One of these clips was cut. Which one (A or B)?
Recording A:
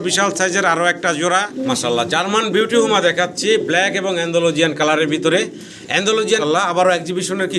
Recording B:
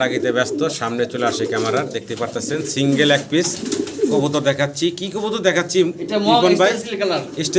A